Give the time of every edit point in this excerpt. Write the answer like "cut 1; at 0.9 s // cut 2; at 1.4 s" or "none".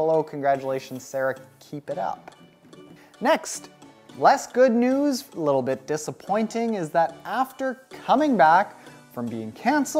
cut 1; at 4.9 s

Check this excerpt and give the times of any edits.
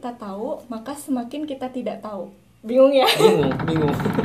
none

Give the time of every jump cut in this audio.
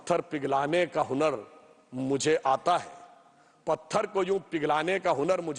none

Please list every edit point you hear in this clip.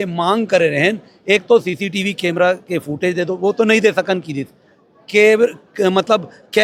none

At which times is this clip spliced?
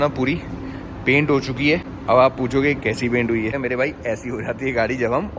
cut 1; at 1.9 s // cut 2; at 3.6 s

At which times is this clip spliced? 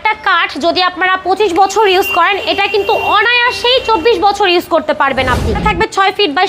cut 1; at 5.5 s

